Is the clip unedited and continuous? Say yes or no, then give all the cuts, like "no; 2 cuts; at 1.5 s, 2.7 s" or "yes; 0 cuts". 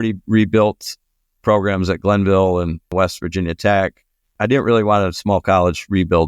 no; 3 cuts; at 1.4 s, 2.9 s, 4.3 s